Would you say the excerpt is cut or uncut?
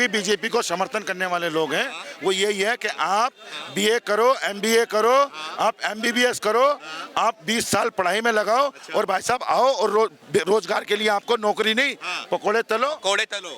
uncut